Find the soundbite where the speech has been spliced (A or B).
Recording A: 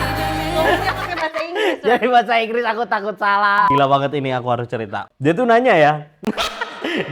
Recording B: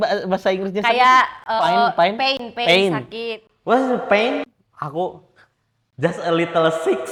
A